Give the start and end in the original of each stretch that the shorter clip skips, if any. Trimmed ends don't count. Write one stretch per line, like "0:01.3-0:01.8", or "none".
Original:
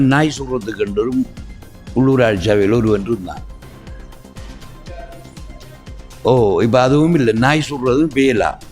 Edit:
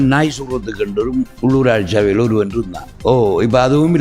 0:01.3-0:01.9
0:03.4-0:06.0